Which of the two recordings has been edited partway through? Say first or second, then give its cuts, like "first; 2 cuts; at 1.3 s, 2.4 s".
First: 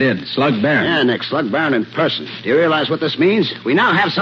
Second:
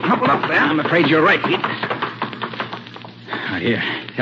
second; 1 cut; at 2.9 s